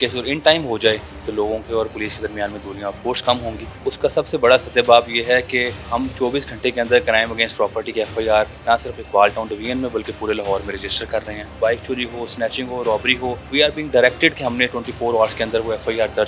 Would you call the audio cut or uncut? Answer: cut